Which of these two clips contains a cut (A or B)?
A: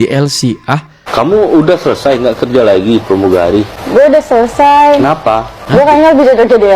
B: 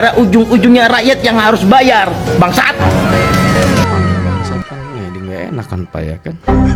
A